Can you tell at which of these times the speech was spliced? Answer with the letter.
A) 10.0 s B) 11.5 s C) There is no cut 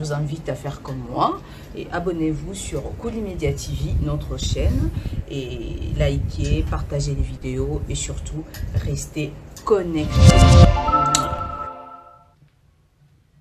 A